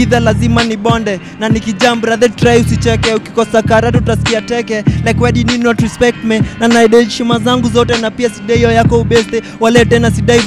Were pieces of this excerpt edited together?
no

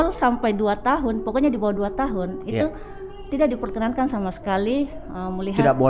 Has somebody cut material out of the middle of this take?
no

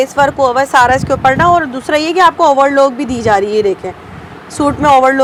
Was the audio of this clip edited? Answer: no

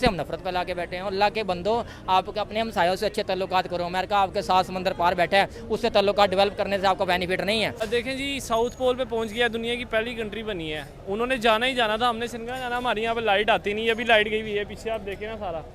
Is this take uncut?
no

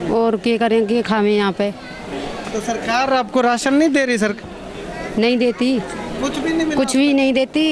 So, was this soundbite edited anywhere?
no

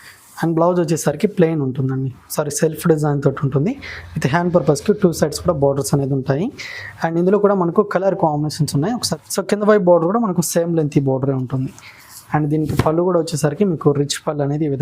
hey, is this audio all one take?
no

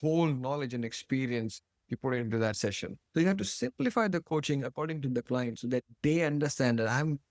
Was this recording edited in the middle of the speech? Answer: yes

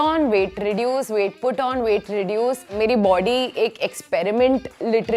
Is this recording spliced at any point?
no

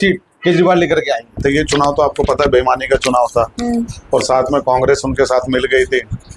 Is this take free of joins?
no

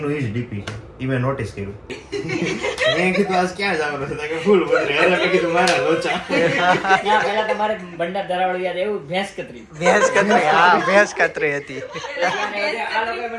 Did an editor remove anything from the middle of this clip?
yes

